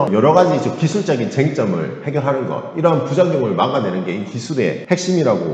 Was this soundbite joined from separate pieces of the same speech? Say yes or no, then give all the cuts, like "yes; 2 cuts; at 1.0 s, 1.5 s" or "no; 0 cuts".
no; 0 cuts